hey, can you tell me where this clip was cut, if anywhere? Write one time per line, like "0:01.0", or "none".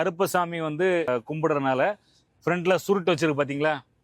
0:01.1